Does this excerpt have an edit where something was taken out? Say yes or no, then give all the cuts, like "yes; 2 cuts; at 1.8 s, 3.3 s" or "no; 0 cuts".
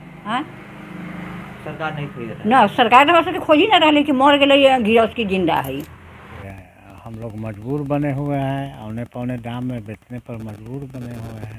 yes; 1 cut; at 6.5 s